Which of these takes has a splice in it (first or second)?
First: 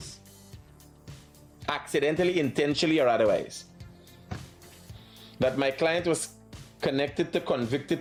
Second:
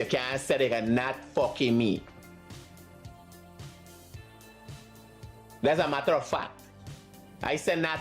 second